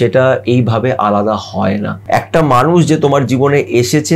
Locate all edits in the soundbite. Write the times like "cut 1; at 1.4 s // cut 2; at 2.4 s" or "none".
cut 1; at 2.0 s